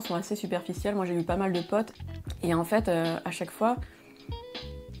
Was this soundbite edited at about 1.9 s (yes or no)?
yes